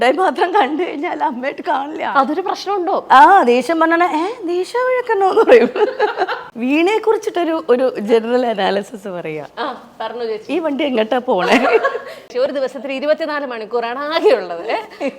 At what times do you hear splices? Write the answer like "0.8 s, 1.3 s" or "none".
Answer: 2.0 s, 6.3 s, 12.3 s